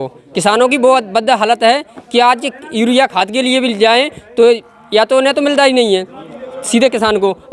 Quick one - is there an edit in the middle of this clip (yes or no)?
no